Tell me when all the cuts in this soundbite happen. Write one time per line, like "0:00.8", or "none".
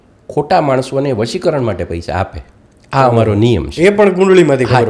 none